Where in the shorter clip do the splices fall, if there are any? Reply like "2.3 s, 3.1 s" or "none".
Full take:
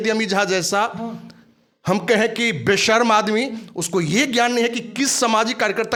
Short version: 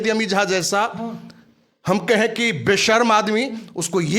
none

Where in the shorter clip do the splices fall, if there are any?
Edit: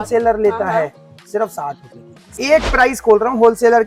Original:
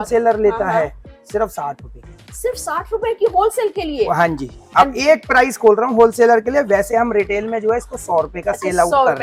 2.4 s

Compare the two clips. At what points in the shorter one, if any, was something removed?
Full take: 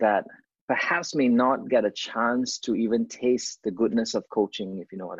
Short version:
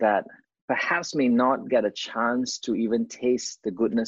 none

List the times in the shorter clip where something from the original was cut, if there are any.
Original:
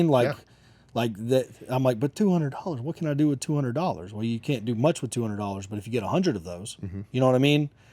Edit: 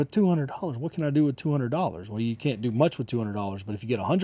none

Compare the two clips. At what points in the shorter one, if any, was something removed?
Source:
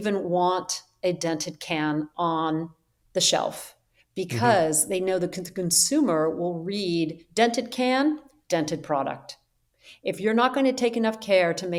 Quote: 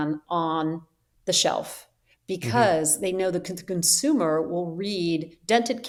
none

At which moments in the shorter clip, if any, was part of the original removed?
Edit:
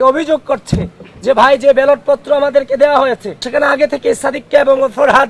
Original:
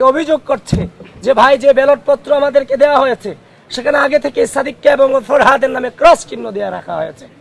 3.3 s

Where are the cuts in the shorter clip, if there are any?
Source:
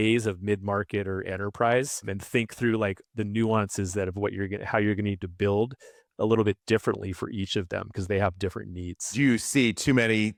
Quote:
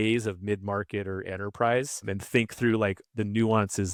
none

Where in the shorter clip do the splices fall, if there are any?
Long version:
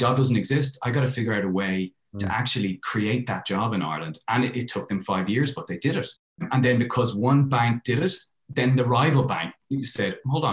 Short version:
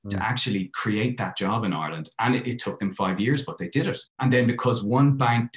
4.1 s

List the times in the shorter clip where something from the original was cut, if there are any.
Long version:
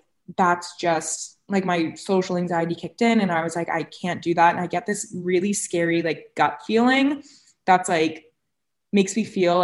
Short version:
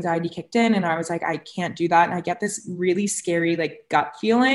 none

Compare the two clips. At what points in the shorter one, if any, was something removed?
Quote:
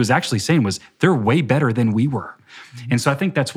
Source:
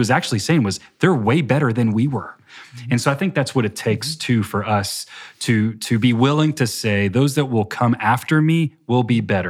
none

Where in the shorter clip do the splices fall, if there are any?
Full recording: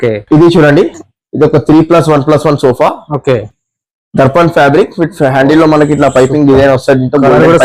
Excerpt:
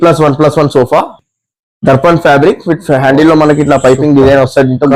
1.2 s

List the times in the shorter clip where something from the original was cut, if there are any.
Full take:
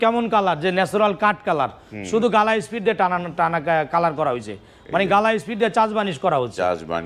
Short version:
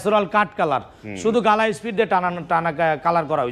none

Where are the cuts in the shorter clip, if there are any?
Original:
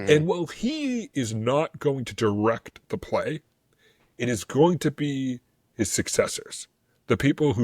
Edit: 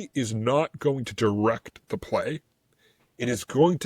none

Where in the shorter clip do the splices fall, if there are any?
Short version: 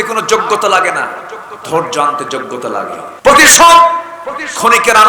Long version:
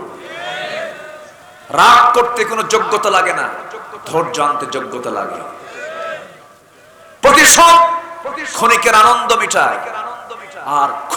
3.0 s

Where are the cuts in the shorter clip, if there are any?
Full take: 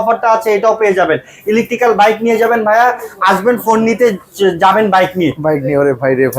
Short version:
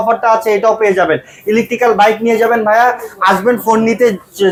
none

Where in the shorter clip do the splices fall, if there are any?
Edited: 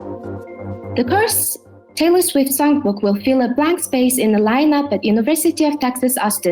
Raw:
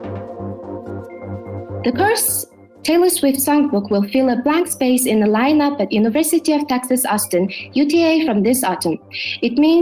0.9 s

